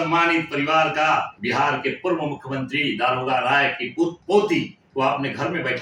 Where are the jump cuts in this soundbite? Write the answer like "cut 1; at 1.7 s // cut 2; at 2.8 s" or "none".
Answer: cut 1; at 1.3 s // cut 2; at 4.2 s // cut 3; at 4.8 s